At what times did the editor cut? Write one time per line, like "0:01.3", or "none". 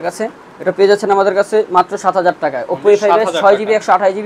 none